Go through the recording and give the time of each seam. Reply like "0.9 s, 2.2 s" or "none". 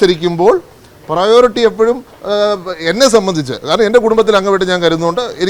none